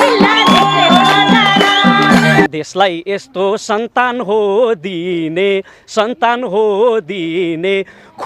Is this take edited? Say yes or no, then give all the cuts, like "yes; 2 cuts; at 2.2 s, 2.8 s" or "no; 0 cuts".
yes; 1 cut; at 2.5 s